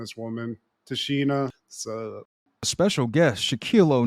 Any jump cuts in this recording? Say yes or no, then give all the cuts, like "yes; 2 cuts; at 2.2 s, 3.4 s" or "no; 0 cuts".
yes; 1 cut; at 2.7 s